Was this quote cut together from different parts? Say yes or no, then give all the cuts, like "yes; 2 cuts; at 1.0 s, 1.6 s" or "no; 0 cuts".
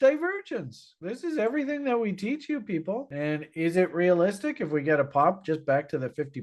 no; 0 cuts